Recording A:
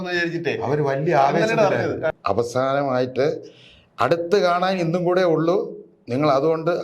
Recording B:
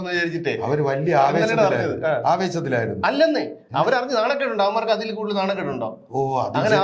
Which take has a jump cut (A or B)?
A